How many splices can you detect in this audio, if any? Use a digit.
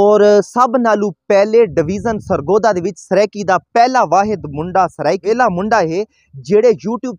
1